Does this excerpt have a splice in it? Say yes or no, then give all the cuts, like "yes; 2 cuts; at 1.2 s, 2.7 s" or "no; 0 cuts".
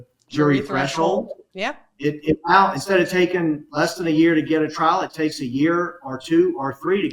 no; 0 cuts